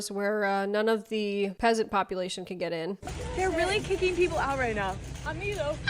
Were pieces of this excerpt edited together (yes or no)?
yes